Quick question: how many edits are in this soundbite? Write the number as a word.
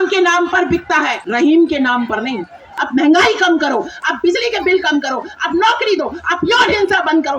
two